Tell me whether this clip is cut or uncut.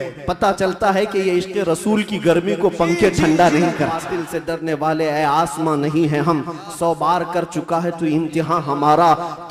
cut